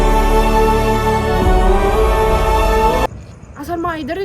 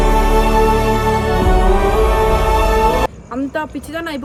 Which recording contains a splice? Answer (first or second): first